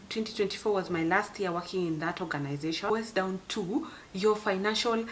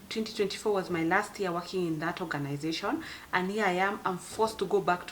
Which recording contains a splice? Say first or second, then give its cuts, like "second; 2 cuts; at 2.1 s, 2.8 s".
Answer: first; 1 cut; at 2.9 s